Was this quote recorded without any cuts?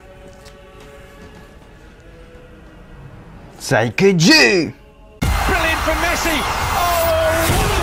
yes; 0 cuts

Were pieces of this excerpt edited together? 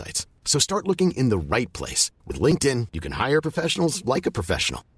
no; 0 cuts

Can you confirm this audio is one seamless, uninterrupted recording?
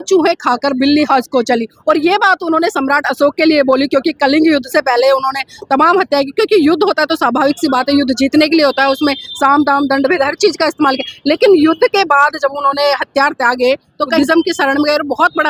no; 1 cut; at 14.1 s

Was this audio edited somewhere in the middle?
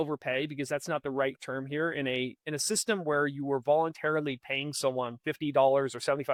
no; 0 cuts

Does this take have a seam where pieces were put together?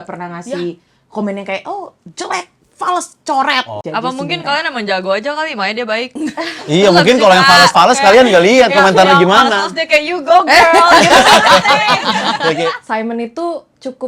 yes; 2 cuts; at 3.8 s, 12.7 s

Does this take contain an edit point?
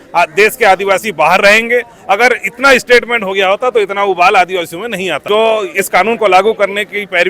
yes; 1 cut; at 5.2 s

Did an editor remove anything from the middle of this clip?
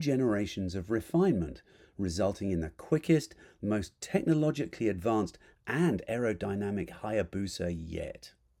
no; 0 cuts

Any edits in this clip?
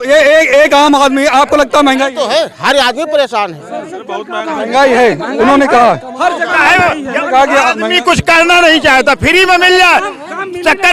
no; 0 cuts

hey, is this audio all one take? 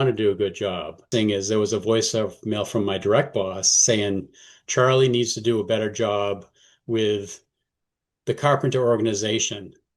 no; 1 cut; at 1.0 s

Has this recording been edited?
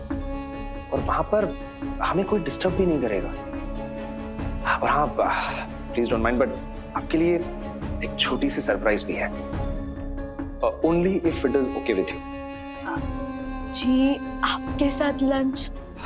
no; 0 cuts

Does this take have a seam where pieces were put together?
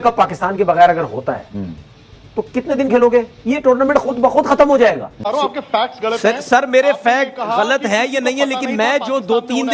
yes; 1 cut; at 5.1 s

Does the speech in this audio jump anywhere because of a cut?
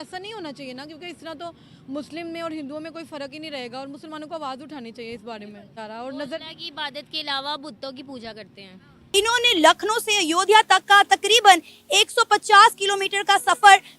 yes; 2 cuts; at 5.8 s, 9.0 s

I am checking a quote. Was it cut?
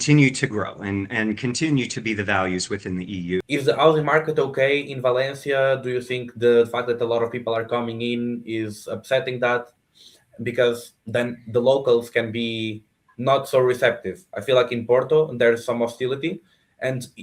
yes; 1 cut; at 3.4 s

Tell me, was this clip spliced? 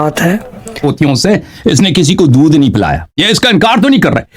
yes; 2 cuts; at 0.9 s, 3.1 s

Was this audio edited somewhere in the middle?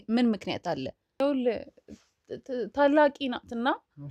yes; 1 cut; at 1.2 s

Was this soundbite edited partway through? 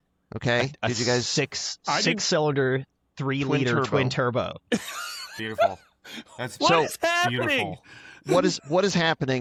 no; 0 cuts

